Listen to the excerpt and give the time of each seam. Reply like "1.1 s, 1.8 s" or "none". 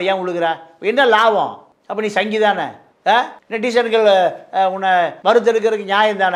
none